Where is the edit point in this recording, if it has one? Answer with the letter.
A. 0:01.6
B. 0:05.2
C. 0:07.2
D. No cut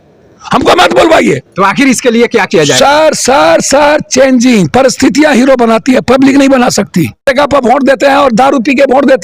C